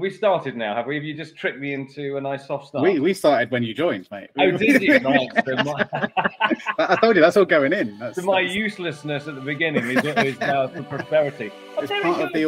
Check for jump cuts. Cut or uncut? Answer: uncut